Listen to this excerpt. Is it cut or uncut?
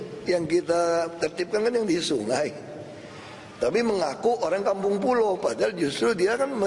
uncut